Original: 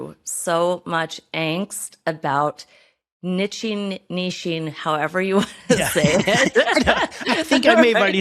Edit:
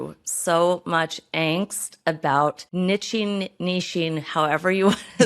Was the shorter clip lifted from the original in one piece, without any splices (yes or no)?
no